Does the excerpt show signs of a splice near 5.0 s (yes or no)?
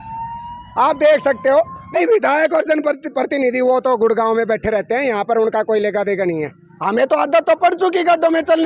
no